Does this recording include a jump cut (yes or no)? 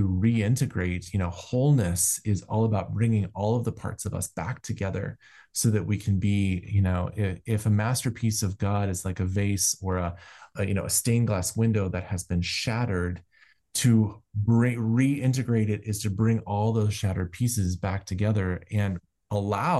no